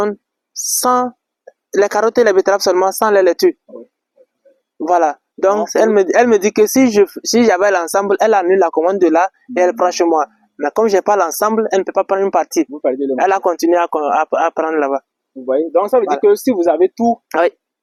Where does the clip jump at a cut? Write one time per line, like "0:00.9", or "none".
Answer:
none